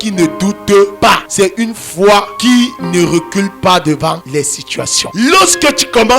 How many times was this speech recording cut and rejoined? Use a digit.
3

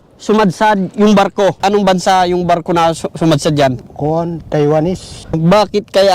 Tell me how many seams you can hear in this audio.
3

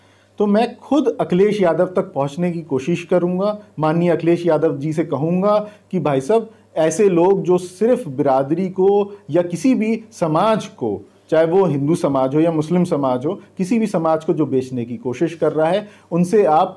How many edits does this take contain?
0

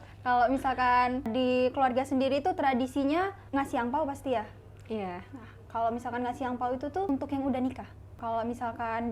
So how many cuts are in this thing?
4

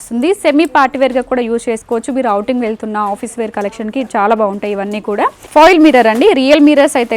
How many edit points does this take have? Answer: 1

